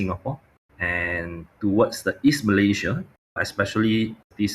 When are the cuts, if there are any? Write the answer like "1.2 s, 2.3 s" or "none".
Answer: none